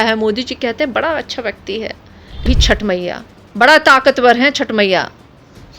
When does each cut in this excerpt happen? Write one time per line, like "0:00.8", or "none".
0:02.5